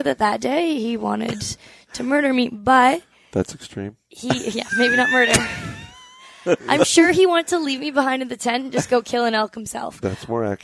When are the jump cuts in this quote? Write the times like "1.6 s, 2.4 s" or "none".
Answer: none

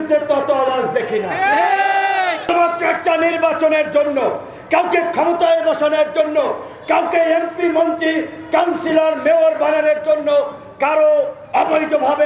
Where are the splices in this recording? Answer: 2.5 s

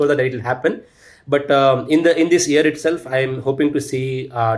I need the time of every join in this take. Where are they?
none

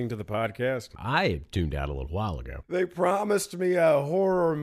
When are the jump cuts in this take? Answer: 0.9 s, 2.7 s

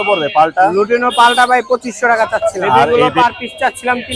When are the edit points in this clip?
2.9 s

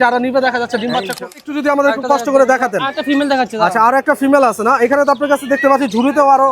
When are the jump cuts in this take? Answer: 1.2 s

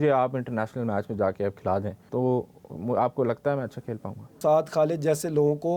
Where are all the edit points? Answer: 2.0 s, 4.4 s

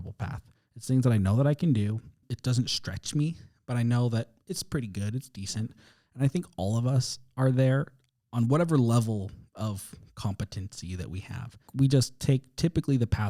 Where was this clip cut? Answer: none

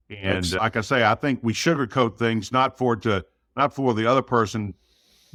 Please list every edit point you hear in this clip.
none

